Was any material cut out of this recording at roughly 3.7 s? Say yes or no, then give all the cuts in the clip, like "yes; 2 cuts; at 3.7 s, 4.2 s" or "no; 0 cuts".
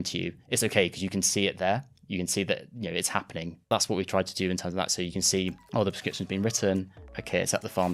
yes; 1 cut; at 3.7 s